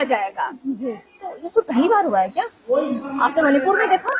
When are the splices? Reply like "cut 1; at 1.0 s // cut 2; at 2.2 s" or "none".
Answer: none